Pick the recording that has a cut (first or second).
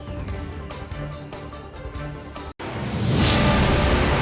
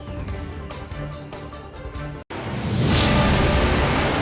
second